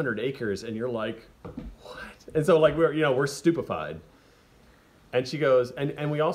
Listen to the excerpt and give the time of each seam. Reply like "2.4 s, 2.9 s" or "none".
none